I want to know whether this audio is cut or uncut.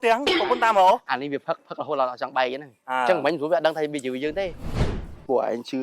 cut